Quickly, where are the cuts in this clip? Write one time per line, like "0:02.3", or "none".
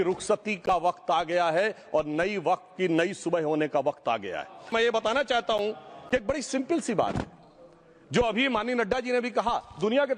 0:04.7